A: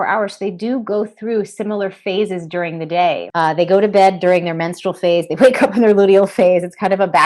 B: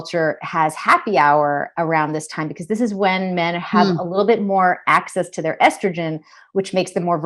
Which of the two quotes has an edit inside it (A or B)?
A